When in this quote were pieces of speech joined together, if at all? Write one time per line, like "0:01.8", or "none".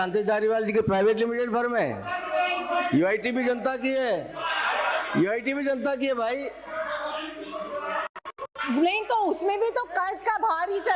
none